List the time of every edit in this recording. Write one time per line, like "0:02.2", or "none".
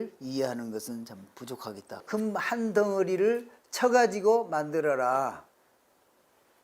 0:02.0